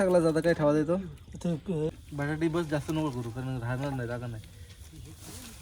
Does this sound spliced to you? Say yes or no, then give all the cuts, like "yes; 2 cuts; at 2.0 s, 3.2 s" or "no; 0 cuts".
yes; 1 cut; at 1.9 s